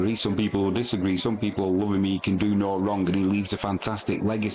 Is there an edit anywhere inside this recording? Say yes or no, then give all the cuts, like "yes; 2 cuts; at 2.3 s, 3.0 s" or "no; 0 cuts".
no; 0 cuts